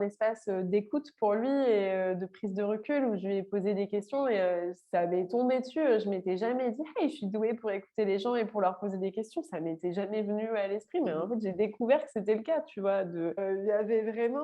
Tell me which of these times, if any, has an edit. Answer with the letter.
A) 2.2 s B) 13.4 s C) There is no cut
B